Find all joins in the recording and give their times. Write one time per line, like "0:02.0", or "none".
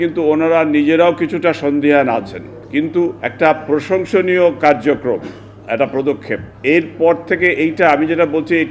0:03.2
0:06.5